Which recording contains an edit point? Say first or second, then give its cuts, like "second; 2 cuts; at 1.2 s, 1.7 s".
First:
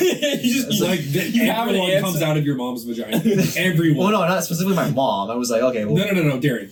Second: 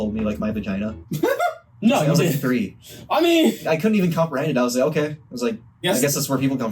second; 3 cuts; at 1.0 s, 3.6 s, 5.8 s